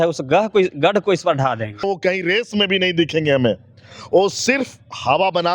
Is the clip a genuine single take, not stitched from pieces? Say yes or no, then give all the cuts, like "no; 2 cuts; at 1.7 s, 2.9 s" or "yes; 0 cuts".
no; 1 cut; at 1.9 s